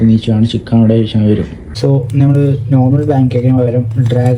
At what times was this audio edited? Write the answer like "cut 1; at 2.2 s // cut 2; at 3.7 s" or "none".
cut 1; at 1.6 s